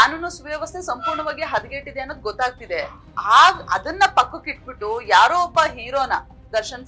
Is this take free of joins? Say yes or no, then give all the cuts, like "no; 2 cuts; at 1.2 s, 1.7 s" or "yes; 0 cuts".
yes; 0 cuts